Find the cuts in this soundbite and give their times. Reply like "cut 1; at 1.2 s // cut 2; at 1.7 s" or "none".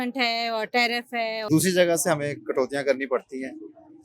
cut 1; at 1.4 s